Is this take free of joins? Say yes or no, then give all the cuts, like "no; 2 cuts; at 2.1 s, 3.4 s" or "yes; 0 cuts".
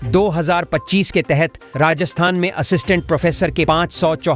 yes; 0 cuts